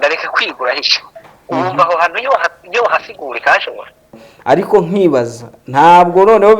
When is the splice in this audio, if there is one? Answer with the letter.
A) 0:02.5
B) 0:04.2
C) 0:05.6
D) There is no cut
B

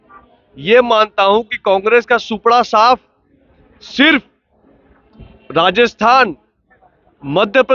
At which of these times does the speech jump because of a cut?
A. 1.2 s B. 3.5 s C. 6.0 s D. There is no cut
D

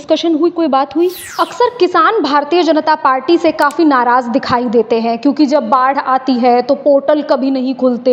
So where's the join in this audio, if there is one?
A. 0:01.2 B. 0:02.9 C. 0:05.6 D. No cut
A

